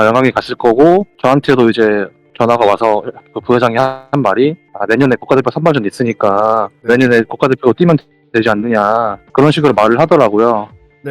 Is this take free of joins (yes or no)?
no